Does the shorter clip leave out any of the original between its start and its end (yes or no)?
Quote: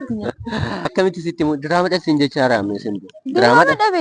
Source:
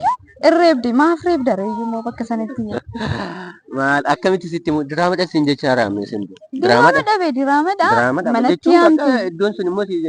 yes